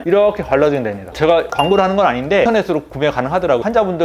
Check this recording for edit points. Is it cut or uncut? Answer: cut